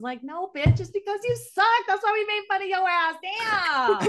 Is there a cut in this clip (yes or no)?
no